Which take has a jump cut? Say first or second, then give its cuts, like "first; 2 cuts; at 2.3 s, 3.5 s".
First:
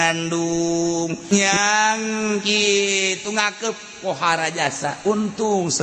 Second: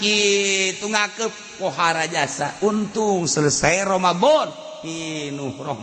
first; 1 cut; at 1.3 s